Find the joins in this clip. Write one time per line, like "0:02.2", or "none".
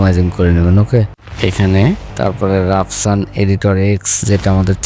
0:01.2
0:02.1